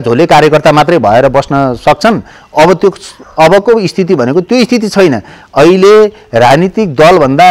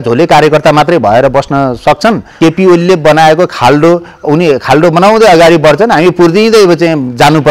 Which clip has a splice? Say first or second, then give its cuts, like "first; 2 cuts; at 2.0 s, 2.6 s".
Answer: second; 1 cut; at 2.3 s